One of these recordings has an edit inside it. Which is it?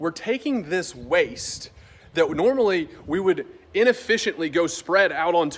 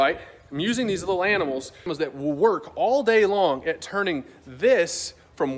second; 1 cut; at 1.9 s

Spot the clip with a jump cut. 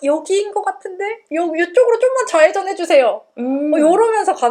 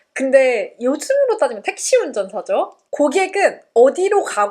second; 1 cut; at 2.8 s

